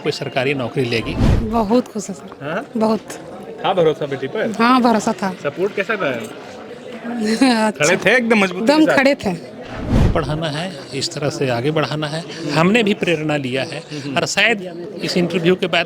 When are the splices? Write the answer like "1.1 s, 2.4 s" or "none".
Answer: 1.2 s, 10.0 s